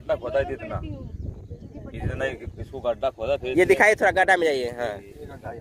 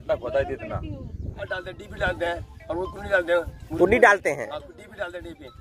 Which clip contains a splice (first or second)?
second